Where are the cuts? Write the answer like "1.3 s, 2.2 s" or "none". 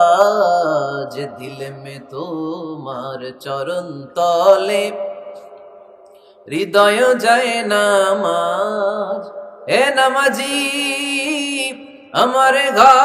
none